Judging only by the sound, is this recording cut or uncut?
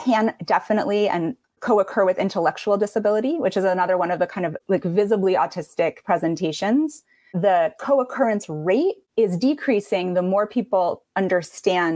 cut